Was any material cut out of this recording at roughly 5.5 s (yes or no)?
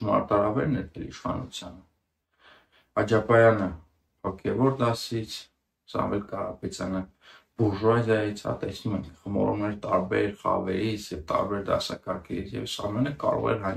no